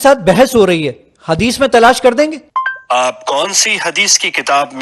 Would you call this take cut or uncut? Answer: cut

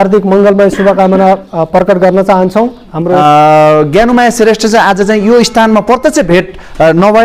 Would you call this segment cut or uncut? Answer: cut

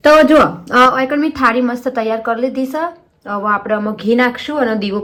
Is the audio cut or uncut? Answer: uncut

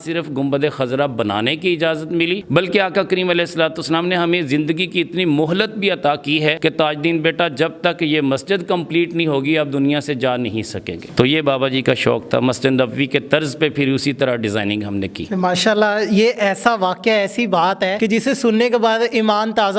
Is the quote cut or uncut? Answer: uncut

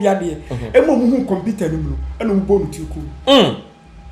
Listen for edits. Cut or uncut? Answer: uncut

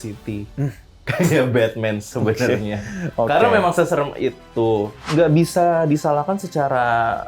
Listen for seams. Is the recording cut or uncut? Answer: cut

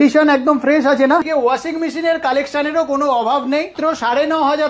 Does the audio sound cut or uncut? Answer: cut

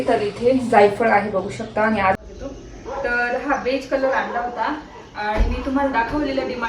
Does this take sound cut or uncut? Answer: cut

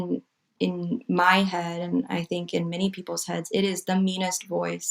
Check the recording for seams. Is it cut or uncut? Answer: uncut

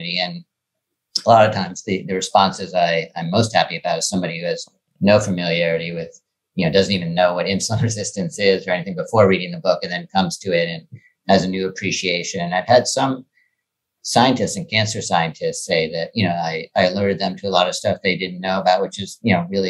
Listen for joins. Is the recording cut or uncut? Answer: uncut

